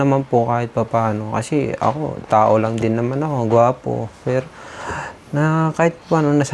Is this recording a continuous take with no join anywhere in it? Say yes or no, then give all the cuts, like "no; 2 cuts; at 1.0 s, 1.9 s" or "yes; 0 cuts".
yes; 0 cuts